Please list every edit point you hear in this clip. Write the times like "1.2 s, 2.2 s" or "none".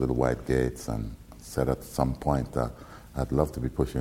none